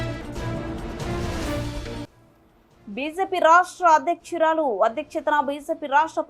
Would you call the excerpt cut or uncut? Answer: uncut